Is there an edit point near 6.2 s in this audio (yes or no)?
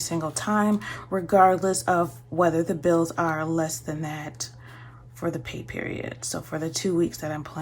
no